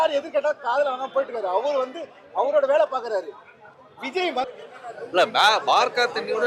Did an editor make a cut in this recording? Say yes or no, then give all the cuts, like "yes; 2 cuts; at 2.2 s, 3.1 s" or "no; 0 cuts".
yes; 1 cut; at 4.5 s